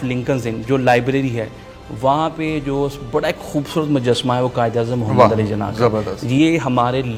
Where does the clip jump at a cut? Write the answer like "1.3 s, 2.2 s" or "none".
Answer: none

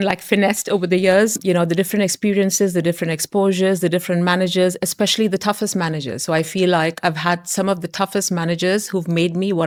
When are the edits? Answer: none

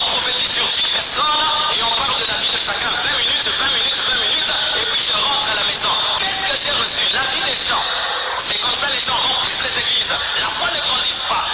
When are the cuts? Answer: none

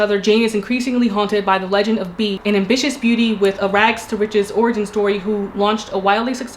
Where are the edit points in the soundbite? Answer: 2.4 s

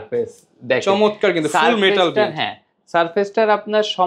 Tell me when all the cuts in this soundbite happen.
none

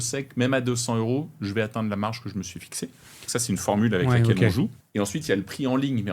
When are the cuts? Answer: 4.8 s

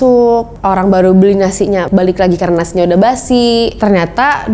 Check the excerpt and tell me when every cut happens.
1.9 s, 3.7 s

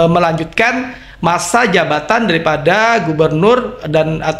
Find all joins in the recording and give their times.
none

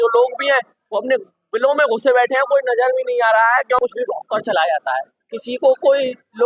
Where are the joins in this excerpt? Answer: 3.8 s

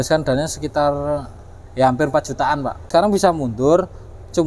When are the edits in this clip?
2.9 s

